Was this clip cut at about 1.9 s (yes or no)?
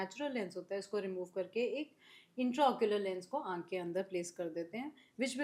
no